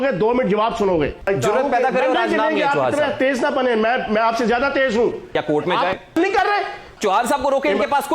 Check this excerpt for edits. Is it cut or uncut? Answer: cut